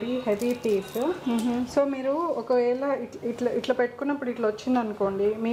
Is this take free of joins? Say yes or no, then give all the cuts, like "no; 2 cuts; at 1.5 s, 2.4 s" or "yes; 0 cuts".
yes; 0 cuts